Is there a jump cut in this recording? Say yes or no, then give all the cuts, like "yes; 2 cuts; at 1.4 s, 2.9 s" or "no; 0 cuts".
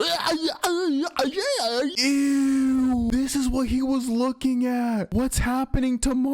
yes; 2 cuts; at 1.9 s, 3.1 s